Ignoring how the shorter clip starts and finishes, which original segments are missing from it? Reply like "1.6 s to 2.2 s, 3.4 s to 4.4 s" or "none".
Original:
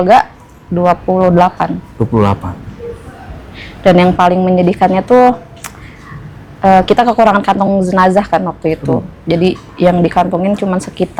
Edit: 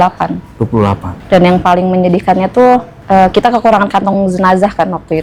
2.5 s to 3.6 s, 5.5 s to 6.5 s